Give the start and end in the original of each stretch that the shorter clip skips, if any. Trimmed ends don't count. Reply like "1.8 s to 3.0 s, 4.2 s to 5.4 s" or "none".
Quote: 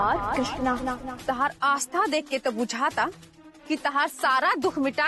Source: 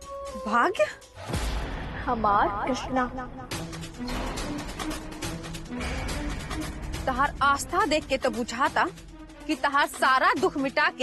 3.4 s to 6.9 s